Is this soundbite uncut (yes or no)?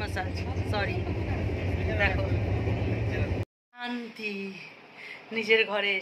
no